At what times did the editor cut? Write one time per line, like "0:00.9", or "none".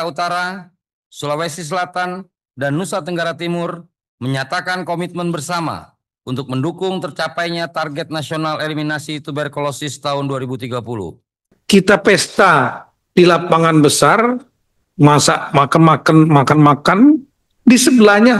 0:11.6